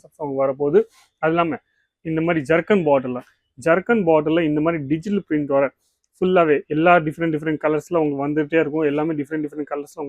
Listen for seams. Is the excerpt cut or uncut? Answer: uncut